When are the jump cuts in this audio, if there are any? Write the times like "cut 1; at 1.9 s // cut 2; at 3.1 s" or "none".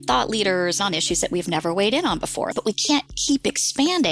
cut 1; at 0.8 s // cut 2; at 2.5 s